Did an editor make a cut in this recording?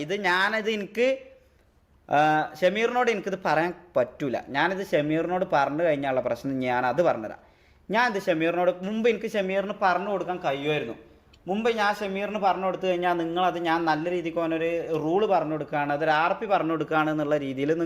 yes; 1 cut; at 1.9 s

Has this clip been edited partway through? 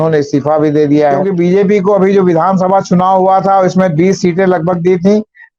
yes; 1 cut; at 1.3 s

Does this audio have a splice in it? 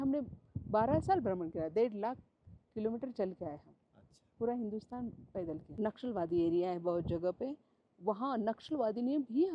yes; 1 cut; at 5.6 s

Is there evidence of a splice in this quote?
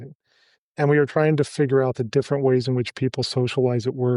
no; 0 cuts

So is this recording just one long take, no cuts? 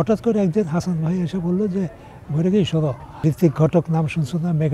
no; 1 cut; at 3.1 s

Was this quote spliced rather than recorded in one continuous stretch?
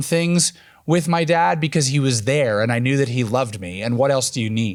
no; 0 cuts

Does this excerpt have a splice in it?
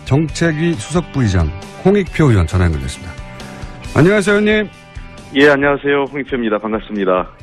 no; 0 cuts

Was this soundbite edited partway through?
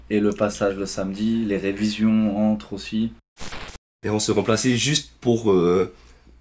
yes; 1 cut; at 3.4 s

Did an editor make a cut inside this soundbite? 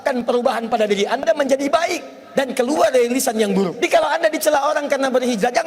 yes; 1 cut; at 3.7 s

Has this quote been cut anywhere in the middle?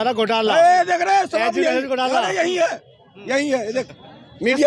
no; 0 cuts

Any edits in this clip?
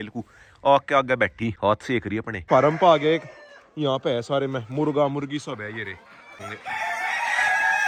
no; 0 cuts

